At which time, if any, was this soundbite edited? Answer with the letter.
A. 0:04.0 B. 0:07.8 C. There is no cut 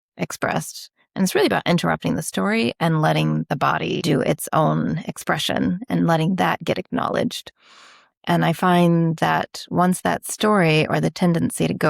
A